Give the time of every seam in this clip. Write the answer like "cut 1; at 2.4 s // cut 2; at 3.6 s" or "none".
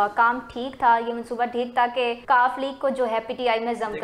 cut 1; at 2.2 s